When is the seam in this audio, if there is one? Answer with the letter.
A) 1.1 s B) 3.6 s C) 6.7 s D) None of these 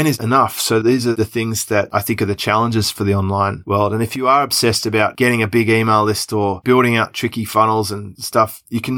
D